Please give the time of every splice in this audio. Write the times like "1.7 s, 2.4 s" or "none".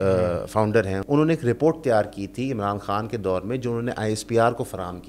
1.0 s